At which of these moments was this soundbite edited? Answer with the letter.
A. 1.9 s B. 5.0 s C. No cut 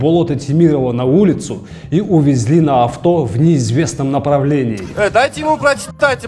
C